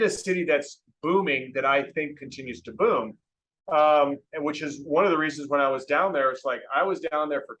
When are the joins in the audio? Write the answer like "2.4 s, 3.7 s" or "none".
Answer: none